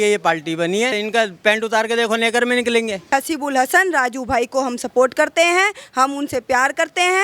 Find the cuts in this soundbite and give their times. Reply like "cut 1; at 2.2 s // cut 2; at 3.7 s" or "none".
cut 1; at 1.0 s // cut 2; at 3.1 s

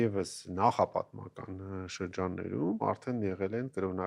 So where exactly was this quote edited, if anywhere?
cut 1; at 2.8 s

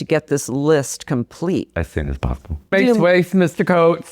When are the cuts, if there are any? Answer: cut 1; at 2.7 s

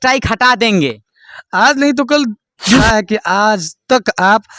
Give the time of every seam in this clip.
cut 1; at 2.8 s

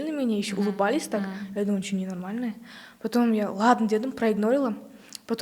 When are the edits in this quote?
none

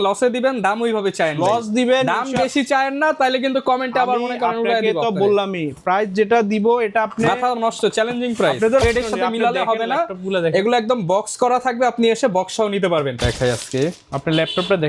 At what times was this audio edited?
cut 1; at 8.8 s // cut 2; at 13.2 s

